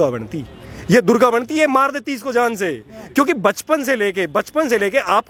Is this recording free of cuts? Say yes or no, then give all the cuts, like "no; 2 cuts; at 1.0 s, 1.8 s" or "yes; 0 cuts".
yes; 0 cuts